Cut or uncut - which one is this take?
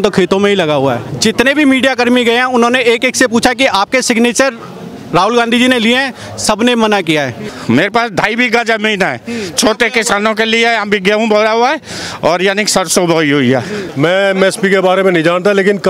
cut